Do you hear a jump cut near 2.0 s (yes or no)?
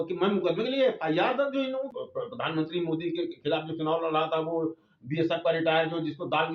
yes